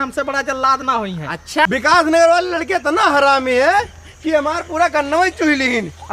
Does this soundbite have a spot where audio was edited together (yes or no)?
yes